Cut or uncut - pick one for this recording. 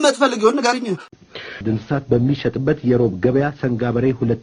cut